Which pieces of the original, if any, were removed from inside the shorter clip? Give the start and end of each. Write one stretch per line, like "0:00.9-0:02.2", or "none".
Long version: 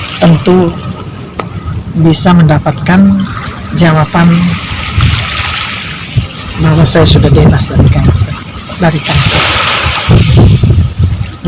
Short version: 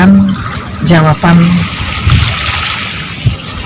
none